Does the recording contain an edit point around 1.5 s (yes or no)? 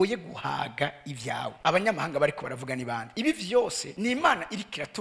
yes